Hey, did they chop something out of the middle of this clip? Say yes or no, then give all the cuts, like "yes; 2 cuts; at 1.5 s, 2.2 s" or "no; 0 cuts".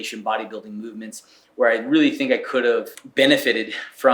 yes; 1 cut; at 3.0 s